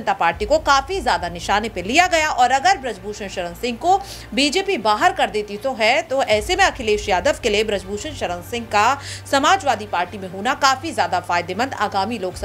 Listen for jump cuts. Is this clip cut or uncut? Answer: uncut